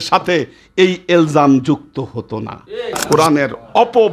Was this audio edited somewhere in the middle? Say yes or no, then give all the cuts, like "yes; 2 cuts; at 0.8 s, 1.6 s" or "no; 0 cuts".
yes; 1 cut; at 3.0 s